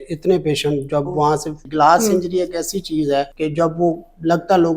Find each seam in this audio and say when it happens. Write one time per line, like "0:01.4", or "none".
0:01.6
0:03.3